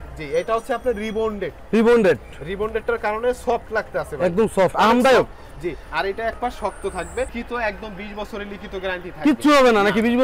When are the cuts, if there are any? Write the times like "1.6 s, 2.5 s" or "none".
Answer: 7.3 s

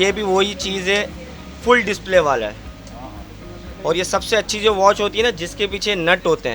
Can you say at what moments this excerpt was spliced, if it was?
none

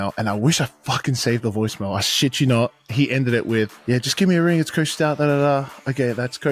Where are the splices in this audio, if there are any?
3.8 s

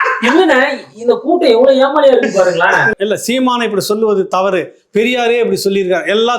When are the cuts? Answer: 2.9 s

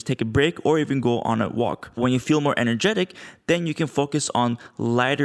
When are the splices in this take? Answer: 2.0 s

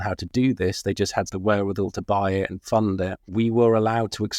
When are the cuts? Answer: 1.3 s, 3.2 s

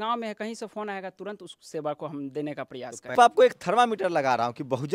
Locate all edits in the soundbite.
3.1 s

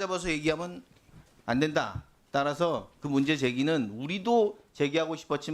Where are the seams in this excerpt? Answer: none

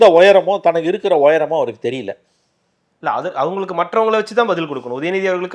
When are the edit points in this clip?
none

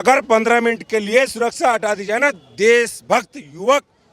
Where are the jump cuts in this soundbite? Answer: none

